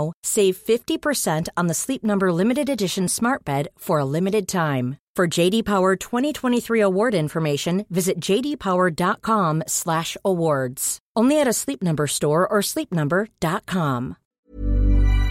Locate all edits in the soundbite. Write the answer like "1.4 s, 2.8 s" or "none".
14.3 s